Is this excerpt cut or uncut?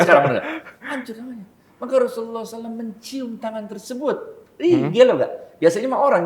uncut